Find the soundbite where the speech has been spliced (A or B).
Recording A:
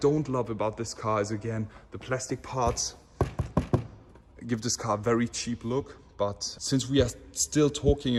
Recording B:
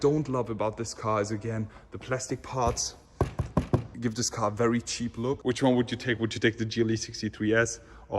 B